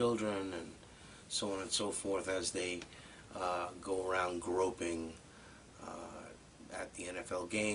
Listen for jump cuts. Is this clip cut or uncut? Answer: cut